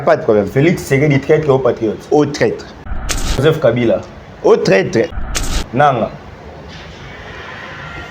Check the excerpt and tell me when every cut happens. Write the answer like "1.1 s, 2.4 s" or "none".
3.0 s, 5.2 s